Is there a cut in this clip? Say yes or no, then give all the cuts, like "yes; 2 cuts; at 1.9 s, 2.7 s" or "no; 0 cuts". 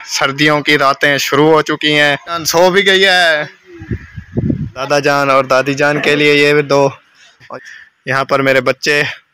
yes; 3 cuts; at 2.4 s, 4.3 s, 7.5 s